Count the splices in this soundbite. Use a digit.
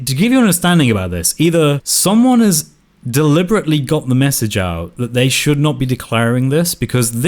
1